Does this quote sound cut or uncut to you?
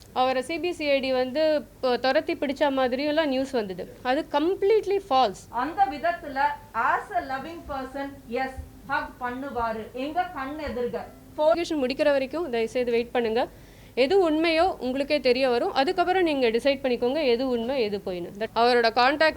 cut